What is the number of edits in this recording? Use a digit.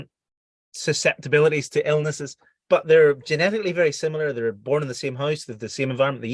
1